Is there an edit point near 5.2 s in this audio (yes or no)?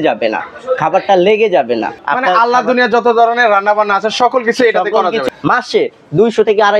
yes